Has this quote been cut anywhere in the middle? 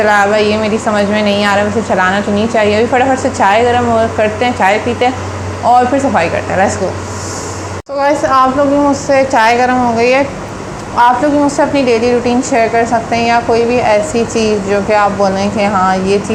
no; 0 cuts

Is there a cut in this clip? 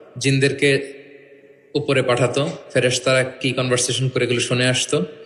no; 0 cuts

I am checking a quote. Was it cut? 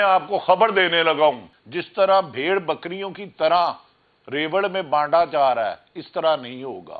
yes; 1 cut; at 1.5 s

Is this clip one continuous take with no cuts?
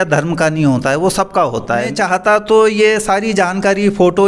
no; 1 cut; at 1.9 s

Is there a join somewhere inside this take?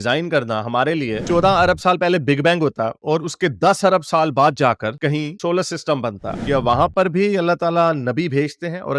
yes; 2 cuts; at 1.2 s, 6.4 s

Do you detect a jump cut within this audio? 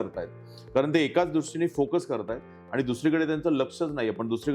no; 0 cuts

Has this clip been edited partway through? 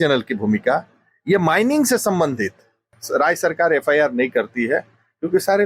yes; 1 cut; at 3.0 s

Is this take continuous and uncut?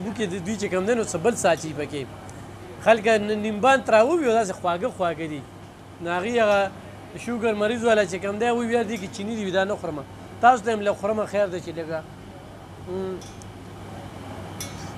yes; 0 cuts

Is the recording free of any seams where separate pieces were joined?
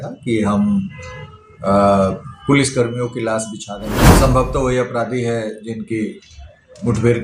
no; 1 cut; at 4.0 s

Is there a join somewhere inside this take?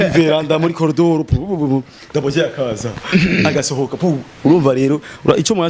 no; 0 cuts

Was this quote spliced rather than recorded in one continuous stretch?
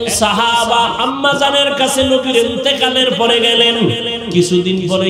yes; 1 cut; at 1.0 s

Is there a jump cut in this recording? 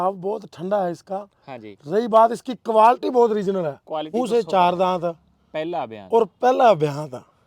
yes; 1 cut; at 4.1 s

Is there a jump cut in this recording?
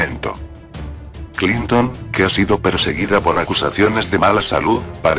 no; 0 cuts

